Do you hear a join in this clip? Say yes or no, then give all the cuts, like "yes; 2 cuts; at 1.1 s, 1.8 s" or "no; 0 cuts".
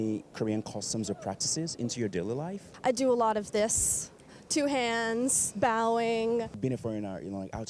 yes; 3 cuts; at 2.6 s, 5.4 s, 6.6 s